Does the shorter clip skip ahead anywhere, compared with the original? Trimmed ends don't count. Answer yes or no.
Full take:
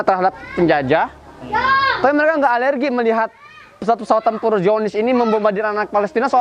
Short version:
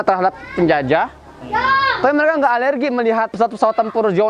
yes